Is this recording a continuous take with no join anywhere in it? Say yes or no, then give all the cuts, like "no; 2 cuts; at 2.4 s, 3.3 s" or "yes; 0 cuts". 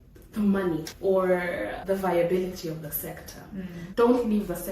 no; 1 cut; at 3.8 s